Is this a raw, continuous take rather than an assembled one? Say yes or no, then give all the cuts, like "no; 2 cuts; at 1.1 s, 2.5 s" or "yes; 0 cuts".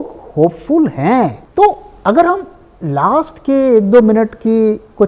no; 1 cut; at 1.4 s